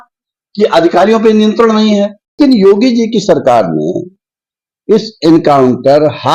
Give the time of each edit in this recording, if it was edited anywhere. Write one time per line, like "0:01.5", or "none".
0:02.4